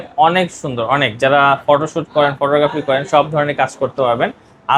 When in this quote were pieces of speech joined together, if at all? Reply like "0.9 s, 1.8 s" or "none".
none